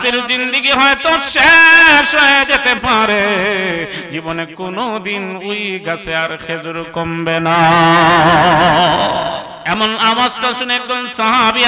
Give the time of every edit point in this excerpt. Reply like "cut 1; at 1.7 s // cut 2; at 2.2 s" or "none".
cut 1; at 9.5 s

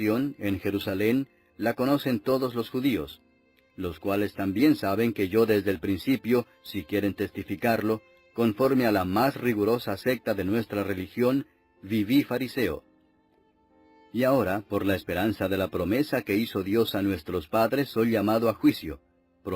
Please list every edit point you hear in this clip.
cut 1; at 17.2 s

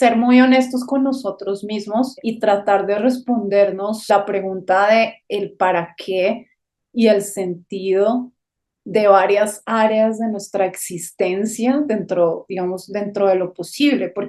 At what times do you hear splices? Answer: cut 1; at 2.2 s // cut 2; at 4.0 s

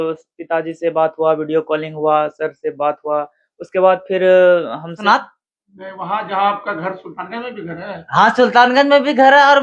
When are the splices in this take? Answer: cut 1; at 5.0 s

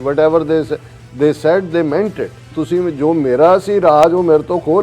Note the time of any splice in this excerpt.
cut 1; at 2.4 s

